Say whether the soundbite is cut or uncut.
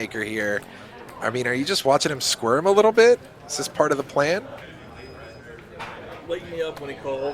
cut